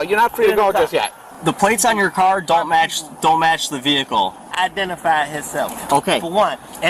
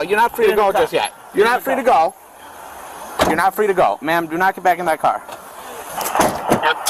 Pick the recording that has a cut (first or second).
first